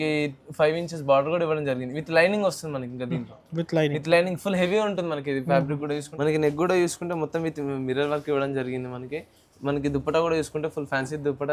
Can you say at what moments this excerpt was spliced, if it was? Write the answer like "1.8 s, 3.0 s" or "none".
6.1 s